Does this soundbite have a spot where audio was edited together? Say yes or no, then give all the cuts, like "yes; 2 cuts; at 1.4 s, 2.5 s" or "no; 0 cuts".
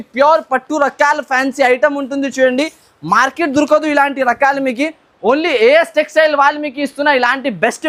no; 0 cuts